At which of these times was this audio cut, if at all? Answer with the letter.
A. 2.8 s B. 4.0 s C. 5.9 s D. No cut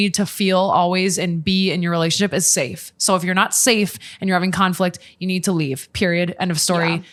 D